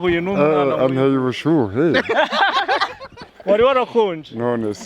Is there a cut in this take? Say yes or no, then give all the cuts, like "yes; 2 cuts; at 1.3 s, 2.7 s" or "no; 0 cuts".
yes; 1 cut; at 3.3 s